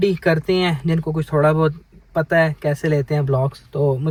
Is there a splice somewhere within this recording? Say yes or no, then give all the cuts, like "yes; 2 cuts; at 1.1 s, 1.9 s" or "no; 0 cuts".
no; 0 cuts